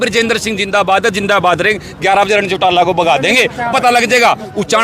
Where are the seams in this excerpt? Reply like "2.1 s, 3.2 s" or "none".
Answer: none